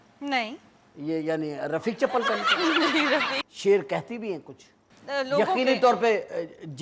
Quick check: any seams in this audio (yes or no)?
yes